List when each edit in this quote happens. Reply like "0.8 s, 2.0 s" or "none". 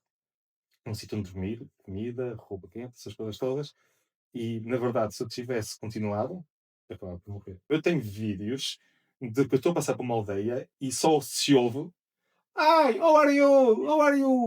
7.7 s